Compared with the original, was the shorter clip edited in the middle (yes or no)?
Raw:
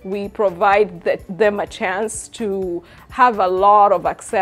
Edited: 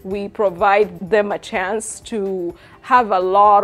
yes